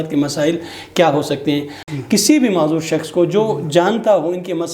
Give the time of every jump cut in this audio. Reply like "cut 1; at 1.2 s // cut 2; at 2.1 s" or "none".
cut 1; at 1.8 s

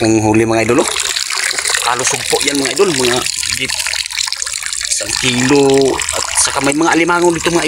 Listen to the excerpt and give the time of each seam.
none

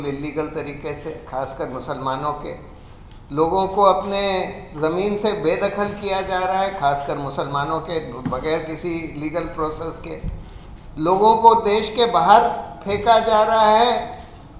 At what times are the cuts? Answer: none

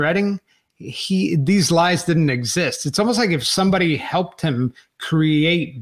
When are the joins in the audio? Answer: none

